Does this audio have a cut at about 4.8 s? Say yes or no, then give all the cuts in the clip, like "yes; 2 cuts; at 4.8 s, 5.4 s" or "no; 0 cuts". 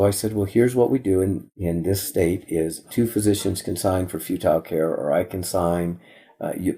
no; 2 cuts; at 2.0 s, 2.8 s